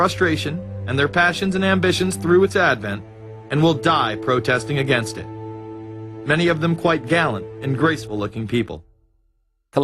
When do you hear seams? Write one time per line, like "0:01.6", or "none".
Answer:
0:04.0